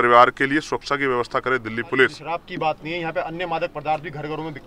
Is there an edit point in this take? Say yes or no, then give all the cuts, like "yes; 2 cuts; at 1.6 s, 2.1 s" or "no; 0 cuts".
yes; 1 cut; at 2.3 s